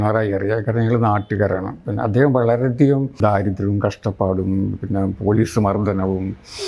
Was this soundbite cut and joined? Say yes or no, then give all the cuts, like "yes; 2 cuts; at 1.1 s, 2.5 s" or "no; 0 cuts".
yes; 2 cuts; at 1.8 s, 3.2 s